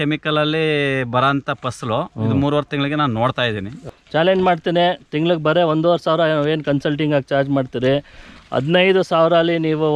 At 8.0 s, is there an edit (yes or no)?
no